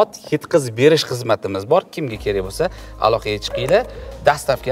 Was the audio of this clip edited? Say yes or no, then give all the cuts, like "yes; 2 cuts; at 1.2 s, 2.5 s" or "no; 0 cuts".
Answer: no; 0 cuts